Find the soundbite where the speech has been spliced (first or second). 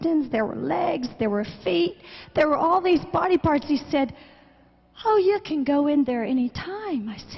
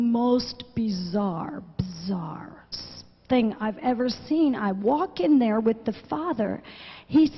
first